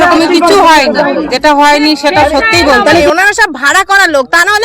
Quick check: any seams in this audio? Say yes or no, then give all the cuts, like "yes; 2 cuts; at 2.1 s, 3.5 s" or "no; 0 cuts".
yes; 2 cuts; at 1.3 s, 3.0 s